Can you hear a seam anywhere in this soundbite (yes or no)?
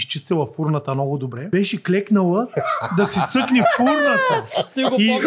yes